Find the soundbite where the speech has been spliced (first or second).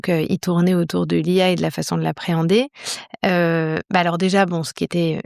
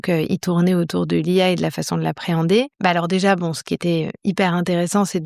second